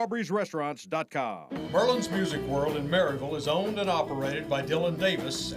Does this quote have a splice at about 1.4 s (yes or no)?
yes